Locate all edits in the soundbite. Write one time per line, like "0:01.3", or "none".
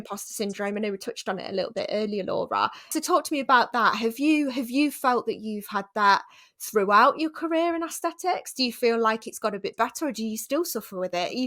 0:02.9